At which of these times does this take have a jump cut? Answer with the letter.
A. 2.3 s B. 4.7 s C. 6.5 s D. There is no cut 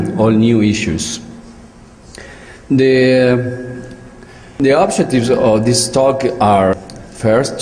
D